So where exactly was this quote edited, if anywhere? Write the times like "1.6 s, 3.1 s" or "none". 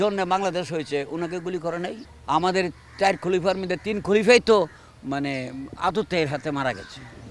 none